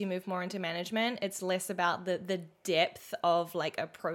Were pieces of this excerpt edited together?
no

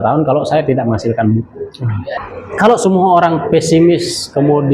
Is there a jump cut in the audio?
yes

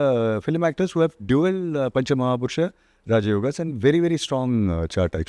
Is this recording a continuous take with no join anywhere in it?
yes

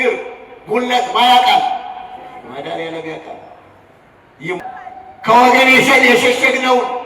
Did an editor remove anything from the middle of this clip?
yes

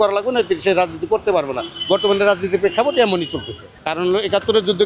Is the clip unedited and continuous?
no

